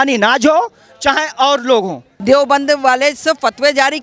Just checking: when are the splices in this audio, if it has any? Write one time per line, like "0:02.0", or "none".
0:02.1